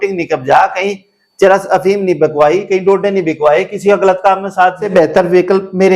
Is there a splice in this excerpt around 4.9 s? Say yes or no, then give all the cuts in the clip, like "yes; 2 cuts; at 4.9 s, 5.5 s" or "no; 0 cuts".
yes; 1 cut; at 4.9 s